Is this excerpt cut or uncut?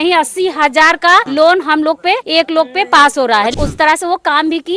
cut